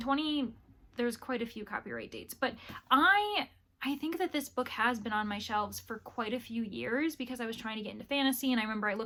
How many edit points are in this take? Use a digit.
0